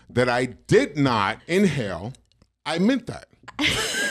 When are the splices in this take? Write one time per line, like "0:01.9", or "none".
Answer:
0:01.4